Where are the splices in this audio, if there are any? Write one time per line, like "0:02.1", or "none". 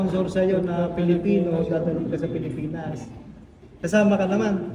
none

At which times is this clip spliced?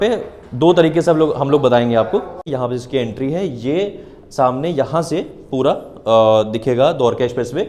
0:02.5

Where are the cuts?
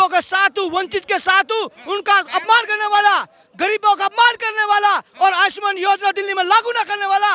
none

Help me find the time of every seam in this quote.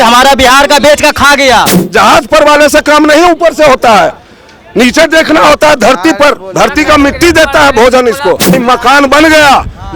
0:01.8
0:08.6

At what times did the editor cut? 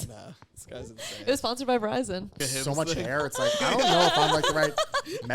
0:02.5

